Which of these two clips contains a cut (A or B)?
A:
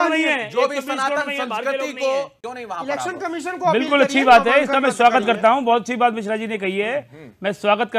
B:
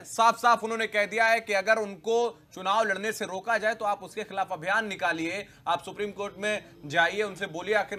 A